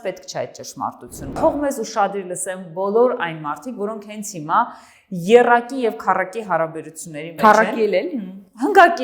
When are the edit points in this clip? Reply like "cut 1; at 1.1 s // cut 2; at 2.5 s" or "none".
cut 1; at 1.3 s